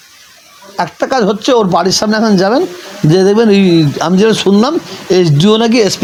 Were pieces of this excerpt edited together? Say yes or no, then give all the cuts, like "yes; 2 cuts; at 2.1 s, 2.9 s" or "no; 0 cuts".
no; 0 cuts